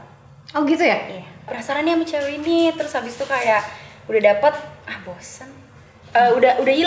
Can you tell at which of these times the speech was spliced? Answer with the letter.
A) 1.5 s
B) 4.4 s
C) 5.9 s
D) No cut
A